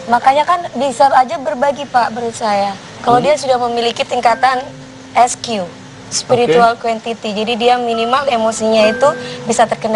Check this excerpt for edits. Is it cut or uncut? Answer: uncut